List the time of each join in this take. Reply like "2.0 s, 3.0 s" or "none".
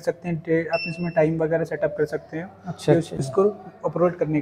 none